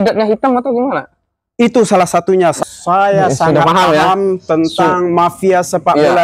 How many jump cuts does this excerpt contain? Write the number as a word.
one